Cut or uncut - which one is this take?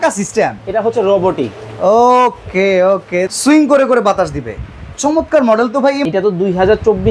cut